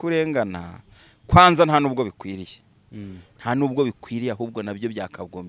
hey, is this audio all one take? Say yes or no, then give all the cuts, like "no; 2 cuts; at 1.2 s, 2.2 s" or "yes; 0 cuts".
yes; 0 cuts